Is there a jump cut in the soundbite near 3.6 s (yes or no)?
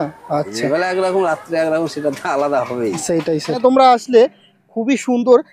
yes